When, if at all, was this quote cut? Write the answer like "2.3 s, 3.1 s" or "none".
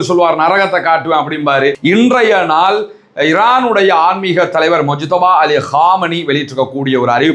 1.7 s